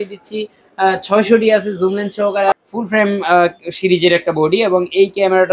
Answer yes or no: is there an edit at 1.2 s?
no